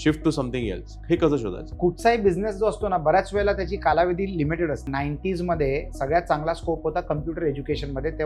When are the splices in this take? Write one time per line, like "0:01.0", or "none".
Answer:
0:01.6
0:04.9